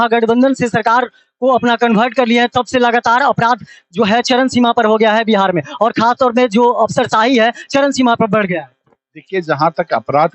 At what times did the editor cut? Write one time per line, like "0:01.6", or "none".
none